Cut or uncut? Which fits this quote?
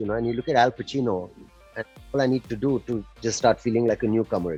uncut